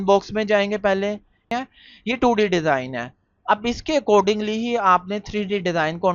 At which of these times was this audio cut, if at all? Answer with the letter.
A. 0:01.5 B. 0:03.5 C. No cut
A